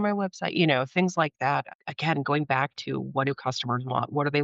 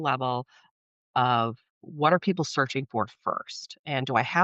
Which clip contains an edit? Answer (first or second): first